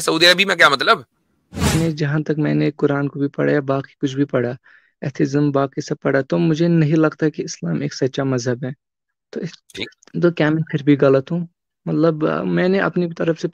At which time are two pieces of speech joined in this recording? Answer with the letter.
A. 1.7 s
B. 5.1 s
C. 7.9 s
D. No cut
A